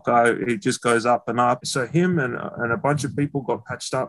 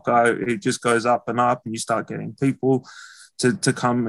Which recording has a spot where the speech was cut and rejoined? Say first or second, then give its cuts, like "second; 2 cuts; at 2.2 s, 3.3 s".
first; 1 cut; at 1.7 s